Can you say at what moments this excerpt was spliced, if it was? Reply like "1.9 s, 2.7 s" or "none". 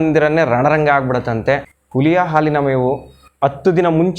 1.8 s